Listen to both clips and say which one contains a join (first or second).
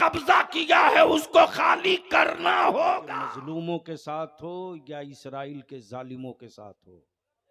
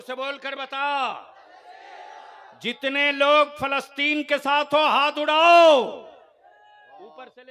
first